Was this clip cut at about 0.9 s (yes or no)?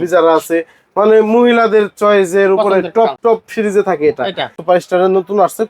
no